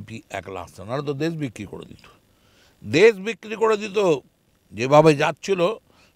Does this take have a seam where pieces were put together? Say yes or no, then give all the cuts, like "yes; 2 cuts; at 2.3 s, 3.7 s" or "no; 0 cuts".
no; 0 cuts